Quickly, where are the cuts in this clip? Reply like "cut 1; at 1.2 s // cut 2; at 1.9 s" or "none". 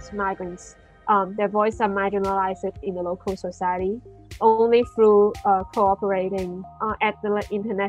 cut 1; at 6.7 s